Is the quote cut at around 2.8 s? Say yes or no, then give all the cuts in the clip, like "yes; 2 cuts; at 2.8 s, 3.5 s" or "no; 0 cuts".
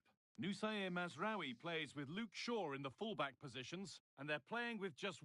no; 1 cut; at 4.1 s